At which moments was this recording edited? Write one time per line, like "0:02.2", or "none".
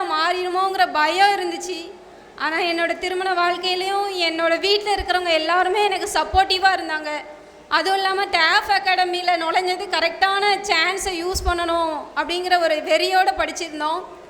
none